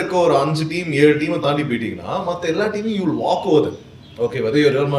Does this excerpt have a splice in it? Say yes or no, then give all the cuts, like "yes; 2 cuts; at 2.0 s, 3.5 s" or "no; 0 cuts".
no; 0 cuts